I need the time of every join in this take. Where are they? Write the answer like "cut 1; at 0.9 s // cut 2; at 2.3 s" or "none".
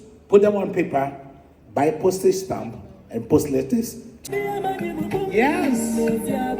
cut 1; at 4.2 s